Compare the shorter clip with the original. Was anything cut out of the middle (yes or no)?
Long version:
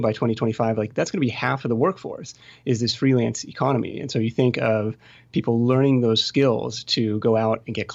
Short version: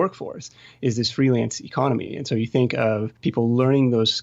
yes